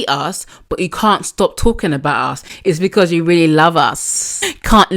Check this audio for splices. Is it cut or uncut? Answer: uncut